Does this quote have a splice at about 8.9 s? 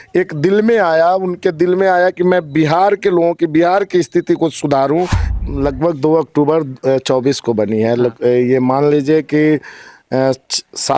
no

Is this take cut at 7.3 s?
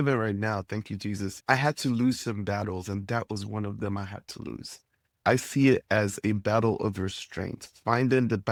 no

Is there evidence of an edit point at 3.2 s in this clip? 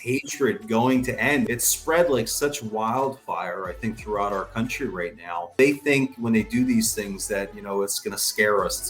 no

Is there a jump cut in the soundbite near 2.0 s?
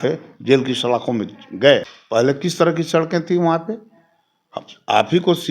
yes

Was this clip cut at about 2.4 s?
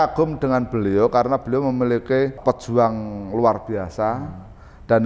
yes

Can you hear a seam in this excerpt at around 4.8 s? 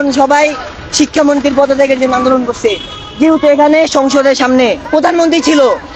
yes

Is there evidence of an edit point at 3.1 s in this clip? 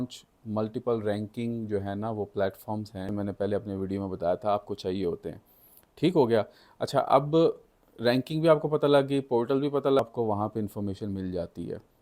yes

